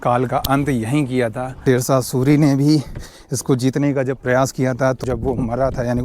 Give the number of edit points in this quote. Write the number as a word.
two